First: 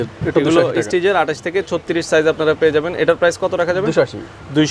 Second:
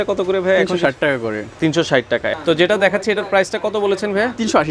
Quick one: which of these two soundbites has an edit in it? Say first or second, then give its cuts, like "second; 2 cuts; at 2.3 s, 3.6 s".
second; 1 cut; at 2.3 s